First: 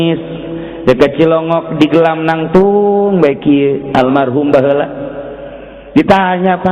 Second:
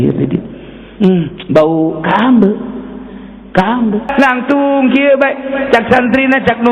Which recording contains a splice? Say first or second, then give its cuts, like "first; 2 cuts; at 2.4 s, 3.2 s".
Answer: second; 1 cut; at 4.1 s